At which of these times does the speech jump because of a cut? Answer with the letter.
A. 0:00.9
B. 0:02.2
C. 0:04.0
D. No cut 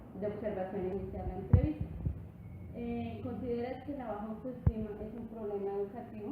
A